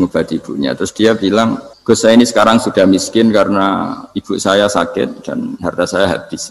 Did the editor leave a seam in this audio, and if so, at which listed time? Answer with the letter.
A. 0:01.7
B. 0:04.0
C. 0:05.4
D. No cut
A